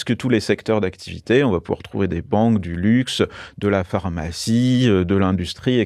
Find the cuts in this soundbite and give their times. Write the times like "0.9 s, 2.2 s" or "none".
none